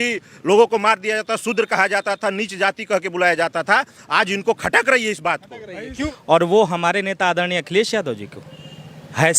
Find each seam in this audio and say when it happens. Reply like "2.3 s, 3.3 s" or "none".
6.0 s